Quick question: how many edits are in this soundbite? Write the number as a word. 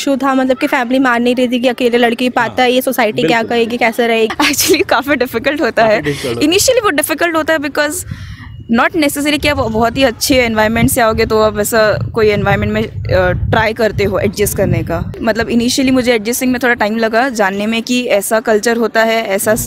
two